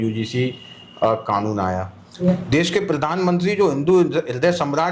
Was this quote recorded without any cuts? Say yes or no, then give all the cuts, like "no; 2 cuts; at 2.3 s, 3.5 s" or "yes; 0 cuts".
no; 1 cut; at 2.0 s